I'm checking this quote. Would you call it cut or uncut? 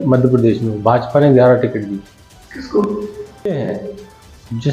cut